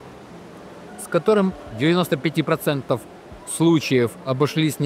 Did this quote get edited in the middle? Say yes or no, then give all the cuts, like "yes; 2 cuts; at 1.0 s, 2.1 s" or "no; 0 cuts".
yes; 1 cut; at 1.7 s